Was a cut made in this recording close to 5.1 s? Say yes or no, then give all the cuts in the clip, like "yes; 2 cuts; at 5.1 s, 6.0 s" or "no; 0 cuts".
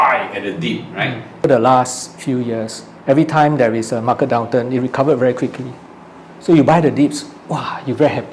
no; 1 cut; at 1.4 s